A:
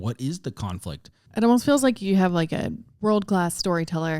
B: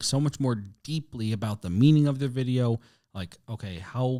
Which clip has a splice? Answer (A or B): A